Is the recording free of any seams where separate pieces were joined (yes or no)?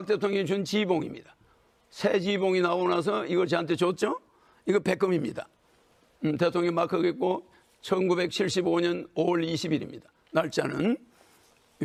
yes